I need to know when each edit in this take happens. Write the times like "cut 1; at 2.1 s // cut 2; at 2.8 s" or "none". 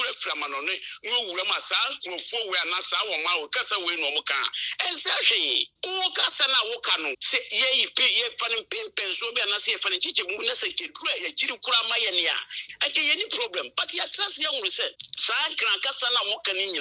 cut 1; at 5.7 s // cut 2; at 7.2 s // cut 3; at 15.1 s